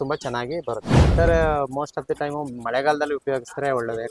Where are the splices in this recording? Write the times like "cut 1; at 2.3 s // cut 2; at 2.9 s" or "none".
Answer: cut 1; at 1.0 s